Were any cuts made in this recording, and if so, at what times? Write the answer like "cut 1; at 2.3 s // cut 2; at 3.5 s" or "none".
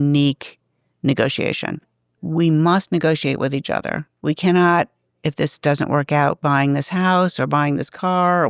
cut 1; at 2.1 s // cut 2; at 4.1 s